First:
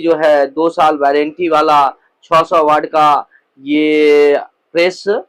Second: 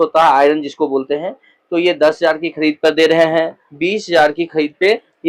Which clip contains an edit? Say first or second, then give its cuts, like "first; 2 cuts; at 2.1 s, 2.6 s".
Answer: second; 1 cut; at 3.6 s